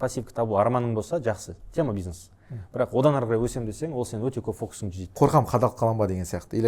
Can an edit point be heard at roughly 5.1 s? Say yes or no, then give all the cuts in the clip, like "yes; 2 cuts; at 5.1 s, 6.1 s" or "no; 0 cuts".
yes; 1 cut; at 5.1 s